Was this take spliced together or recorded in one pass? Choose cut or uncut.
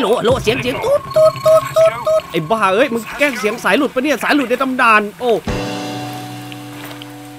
uncut